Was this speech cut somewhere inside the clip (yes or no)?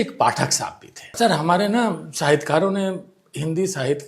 yes